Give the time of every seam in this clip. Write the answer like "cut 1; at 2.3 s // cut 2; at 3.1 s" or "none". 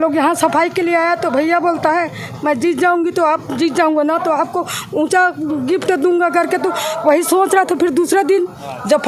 none